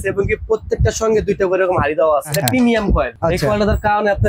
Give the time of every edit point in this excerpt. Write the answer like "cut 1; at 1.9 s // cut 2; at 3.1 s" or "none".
cut 1; at 2.3 s // cut 2; at 3.1 s